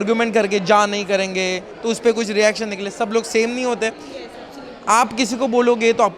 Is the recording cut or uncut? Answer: uncut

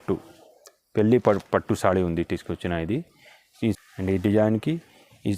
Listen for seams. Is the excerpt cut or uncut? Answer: cut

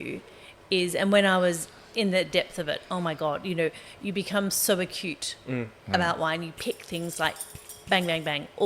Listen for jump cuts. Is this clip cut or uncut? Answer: uncut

